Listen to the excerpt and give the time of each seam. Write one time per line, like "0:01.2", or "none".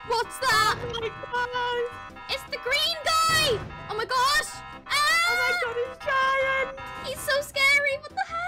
none